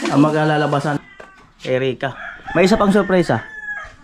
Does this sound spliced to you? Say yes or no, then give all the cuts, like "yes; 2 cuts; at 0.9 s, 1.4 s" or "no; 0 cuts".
yes; 1 cut; at 1.0 s